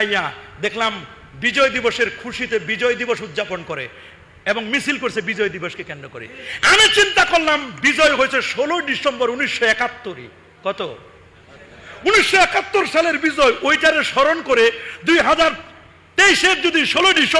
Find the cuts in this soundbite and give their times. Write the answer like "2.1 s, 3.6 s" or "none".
none

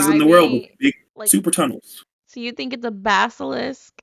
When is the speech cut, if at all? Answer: 1.1 s

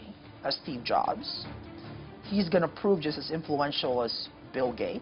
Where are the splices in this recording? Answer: none

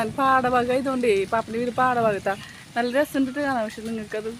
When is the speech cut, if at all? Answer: none

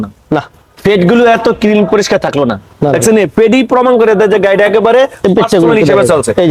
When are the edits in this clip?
none

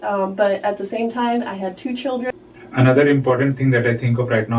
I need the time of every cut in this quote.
2.3 s

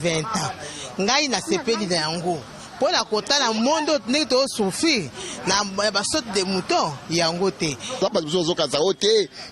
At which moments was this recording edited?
8.0 s

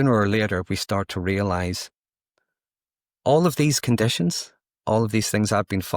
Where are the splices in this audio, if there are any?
none

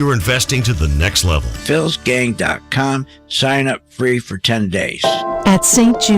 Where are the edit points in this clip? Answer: 5.0 s

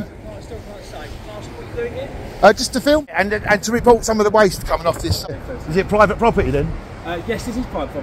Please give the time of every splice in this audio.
3.6 s, 5.3 s

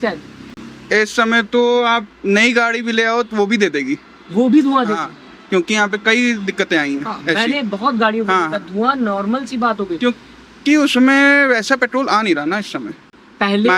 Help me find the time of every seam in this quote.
none

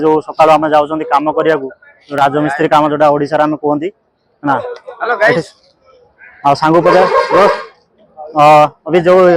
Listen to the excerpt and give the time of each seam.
none

